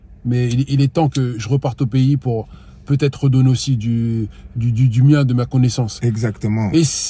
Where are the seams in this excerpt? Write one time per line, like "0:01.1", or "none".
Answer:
none